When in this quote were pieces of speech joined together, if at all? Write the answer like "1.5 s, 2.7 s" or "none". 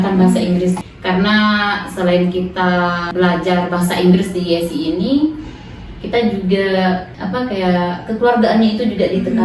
0.8 s, 3.0 s, 7.1 s